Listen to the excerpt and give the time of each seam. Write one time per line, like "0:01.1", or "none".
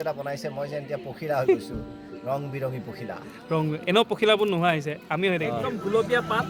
none